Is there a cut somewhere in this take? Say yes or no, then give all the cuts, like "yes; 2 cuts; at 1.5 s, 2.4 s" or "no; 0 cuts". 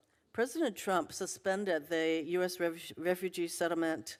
no; 0 cuts